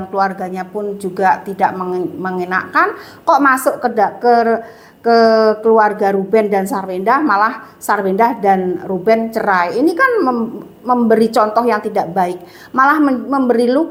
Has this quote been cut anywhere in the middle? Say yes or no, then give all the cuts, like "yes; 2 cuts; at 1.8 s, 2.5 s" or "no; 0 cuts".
no; 0 cuts